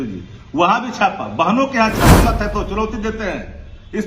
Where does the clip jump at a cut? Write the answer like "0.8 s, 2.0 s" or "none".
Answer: 2.2 s

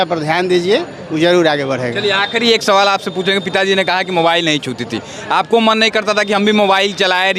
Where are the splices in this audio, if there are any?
none

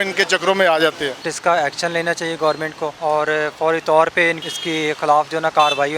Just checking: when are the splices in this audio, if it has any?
1.2 s, 3.0 s, 4.4 s

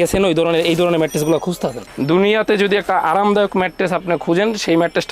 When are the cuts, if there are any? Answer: 1.9 s

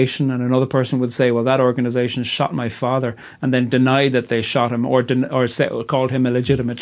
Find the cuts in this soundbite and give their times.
none

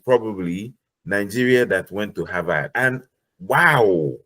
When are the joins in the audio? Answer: 2.7 s

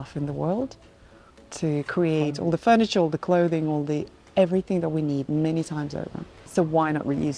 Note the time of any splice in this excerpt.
6.4 s

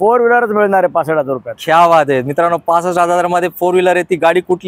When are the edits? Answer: none

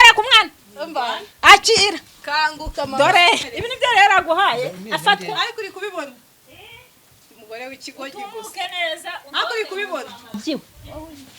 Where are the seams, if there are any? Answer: 3.4 s

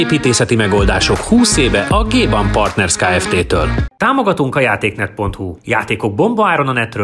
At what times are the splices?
3.9 s

